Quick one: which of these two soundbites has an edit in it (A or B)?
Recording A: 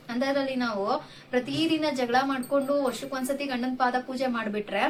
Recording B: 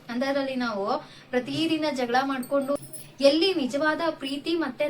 B